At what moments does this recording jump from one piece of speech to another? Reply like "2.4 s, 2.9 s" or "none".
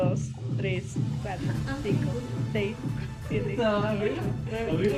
none